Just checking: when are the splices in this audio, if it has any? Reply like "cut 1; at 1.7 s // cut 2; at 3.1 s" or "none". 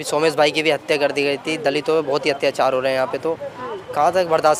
none